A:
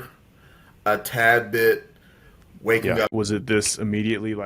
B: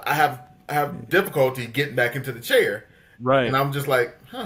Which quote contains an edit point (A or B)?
A